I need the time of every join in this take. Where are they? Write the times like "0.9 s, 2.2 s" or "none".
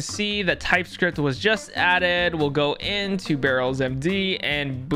none